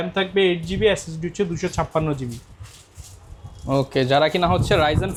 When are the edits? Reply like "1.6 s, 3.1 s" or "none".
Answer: none